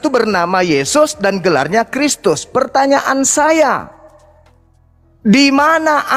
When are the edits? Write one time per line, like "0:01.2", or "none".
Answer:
none